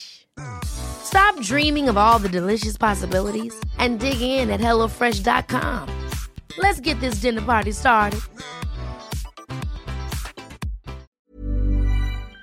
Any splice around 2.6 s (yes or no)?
no